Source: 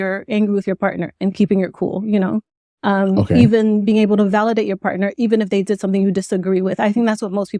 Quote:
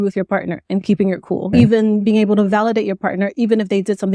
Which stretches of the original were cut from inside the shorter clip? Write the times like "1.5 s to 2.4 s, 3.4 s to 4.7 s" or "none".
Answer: 2.0 s to 3.3 s